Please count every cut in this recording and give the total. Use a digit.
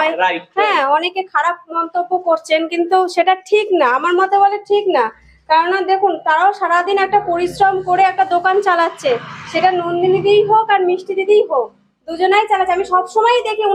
0